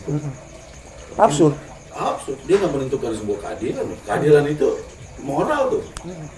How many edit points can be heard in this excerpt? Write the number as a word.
zero